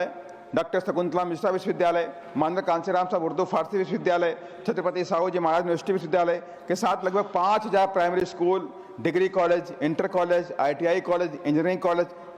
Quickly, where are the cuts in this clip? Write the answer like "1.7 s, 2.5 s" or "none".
none